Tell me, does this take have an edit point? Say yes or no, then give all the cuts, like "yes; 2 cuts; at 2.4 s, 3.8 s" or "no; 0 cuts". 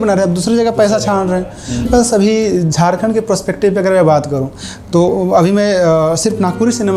yes; 1 cut; at 1.9 s